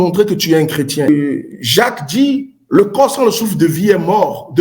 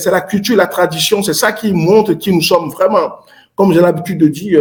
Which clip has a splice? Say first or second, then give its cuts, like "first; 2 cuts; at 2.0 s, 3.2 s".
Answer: first; 1 cut; at 1.1 s